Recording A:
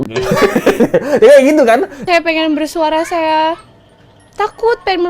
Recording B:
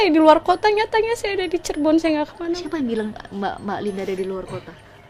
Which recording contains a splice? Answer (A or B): A